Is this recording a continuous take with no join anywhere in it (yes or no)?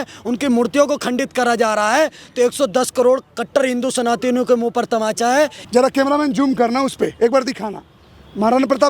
no